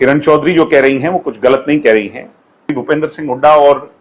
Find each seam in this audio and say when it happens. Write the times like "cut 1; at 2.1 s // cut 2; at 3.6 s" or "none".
cut 1; at 2.7 s